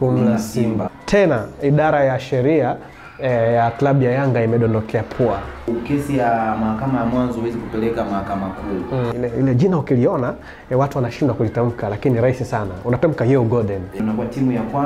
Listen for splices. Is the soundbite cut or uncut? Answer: cut